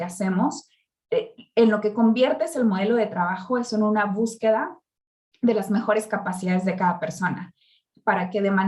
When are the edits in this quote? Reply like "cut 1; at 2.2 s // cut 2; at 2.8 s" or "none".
none